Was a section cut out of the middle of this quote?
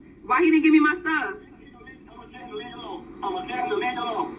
no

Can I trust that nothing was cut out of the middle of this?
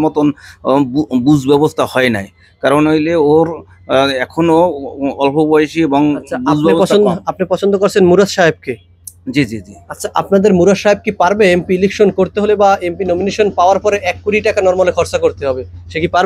yes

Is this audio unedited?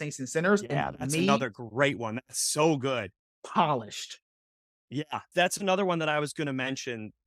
no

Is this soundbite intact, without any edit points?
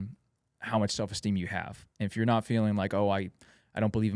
yes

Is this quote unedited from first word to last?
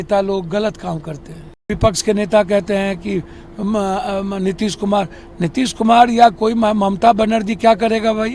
no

